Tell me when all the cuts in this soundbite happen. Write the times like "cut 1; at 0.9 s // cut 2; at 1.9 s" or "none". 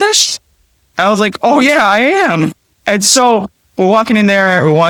none